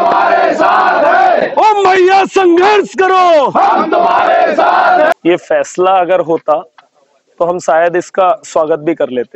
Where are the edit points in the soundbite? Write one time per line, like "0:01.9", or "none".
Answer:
0:05.1